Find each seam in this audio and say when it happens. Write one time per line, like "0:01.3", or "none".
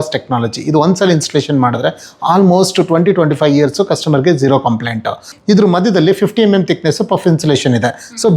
0:05.3